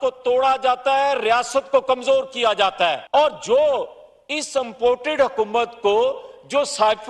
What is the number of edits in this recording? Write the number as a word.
one